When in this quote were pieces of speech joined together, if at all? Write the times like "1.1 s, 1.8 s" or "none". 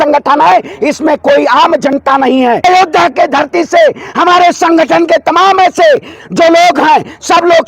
2.6 s

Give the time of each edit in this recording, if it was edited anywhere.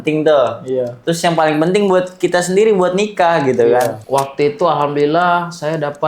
4.0 s

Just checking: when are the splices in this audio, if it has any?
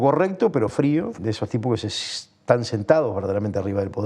1.2 s

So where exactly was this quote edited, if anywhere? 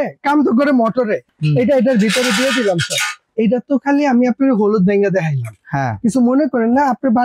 1.3 s, 3.3 s

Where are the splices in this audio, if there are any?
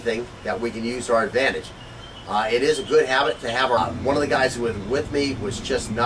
none

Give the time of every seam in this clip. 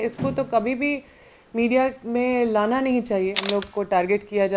3.4 s

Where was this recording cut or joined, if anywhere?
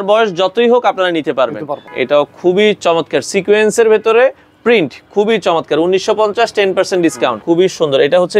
1.8 s, 7.4 s

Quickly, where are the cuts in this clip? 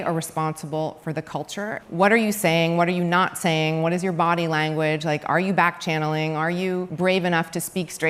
1.8 s, 6.9 s

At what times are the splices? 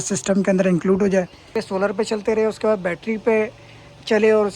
1.6 s

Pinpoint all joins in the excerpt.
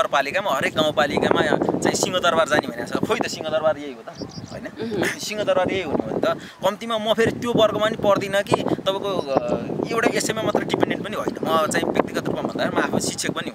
none

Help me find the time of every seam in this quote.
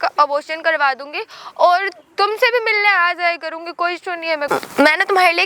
4.5 s

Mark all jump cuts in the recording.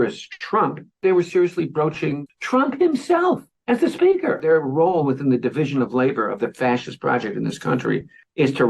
2.2 s, 4.4 s

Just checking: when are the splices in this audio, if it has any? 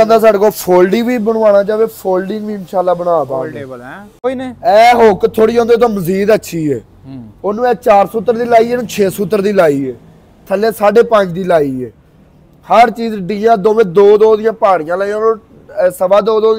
4.2 s

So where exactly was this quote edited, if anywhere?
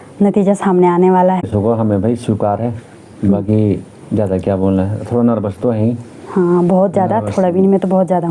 1.4 s

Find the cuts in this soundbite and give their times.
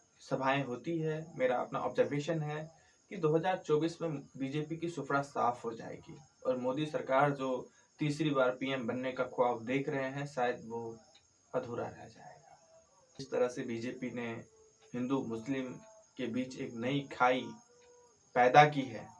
13.2 s

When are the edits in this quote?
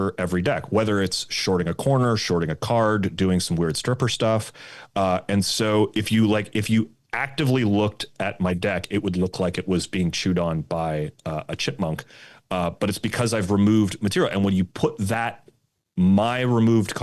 none

